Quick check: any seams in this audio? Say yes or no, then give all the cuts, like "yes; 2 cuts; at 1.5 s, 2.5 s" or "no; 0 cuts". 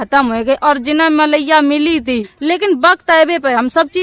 yes; 1 cut; at 2.2 s